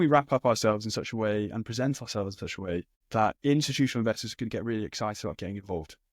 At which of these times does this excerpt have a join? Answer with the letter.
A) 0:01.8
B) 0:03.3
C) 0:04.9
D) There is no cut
B